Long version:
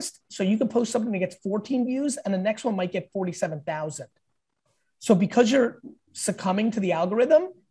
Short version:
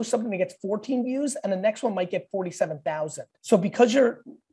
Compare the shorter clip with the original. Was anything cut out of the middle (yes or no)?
yes